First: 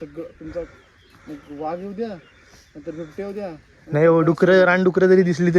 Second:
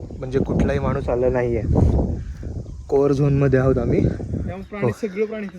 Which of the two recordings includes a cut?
second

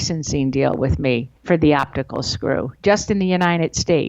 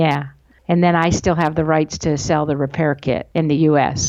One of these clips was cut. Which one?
first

